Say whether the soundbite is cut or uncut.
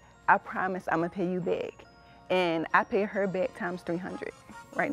uncut